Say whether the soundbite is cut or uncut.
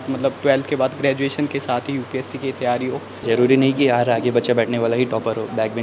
cut